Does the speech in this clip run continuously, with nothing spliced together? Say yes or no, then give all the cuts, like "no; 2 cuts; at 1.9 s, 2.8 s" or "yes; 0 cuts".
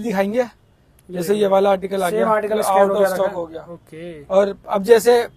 yes; 0 cuts